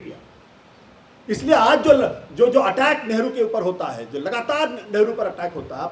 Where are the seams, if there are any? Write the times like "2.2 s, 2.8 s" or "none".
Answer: none